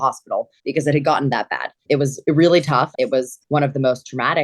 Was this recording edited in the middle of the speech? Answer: yes; 2 cuts; at 1.7 s, 2.9 s

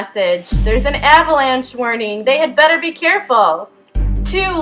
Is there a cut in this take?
no; 0 cuts

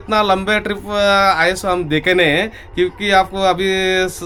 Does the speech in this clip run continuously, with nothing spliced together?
yes; 0 cuts

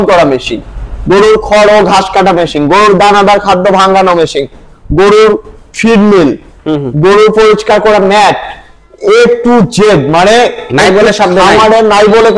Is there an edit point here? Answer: no; 0 cuts

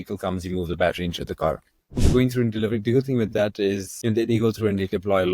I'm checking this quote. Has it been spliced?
yes; 2 cuts; at 2.0 s, 3.9 s

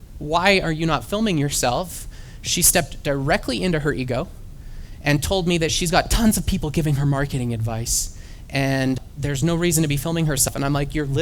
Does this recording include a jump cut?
yes; 2 cuts; at 9.0 s, 10.5 s

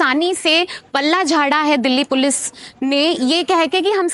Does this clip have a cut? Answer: no; 0 cuts

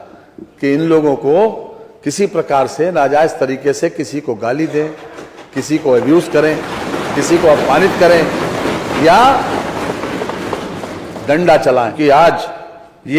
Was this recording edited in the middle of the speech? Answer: yes; 1 cut; at 11.9 s

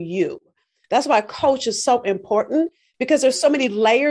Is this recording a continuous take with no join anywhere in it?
yes; 0 cuts

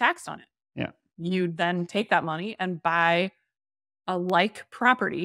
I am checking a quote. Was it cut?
no; 0 cuts

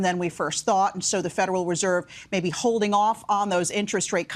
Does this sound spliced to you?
no; 0 cuts

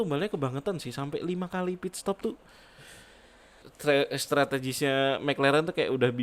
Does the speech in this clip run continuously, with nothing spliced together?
no; 1 cut; at 3.7 s

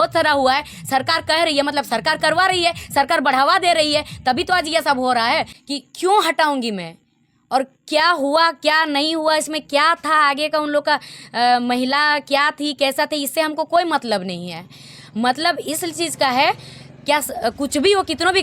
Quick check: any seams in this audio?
yes; 1 cut; at 5.5 s

